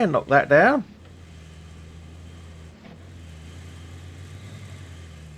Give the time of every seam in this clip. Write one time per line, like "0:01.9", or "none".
none